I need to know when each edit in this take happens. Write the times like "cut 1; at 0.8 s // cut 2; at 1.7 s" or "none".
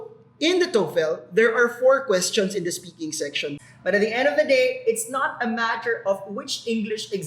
cut 1; at 3.5 s